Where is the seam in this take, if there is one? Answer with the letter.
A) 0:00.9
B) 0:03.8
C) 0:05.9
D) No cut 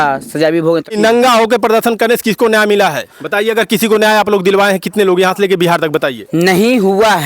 A